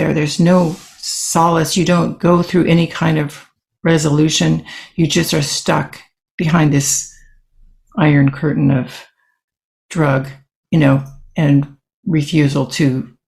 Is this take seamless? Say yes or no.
yes